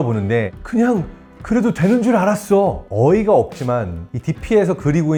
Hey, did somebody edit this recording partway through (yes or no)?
no